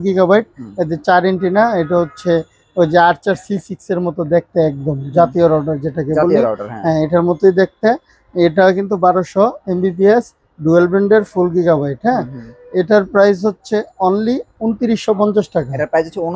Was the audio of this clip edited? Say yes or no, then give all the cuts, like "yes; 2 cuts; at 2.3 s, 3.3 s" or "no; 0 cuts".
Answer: no; 0 cuts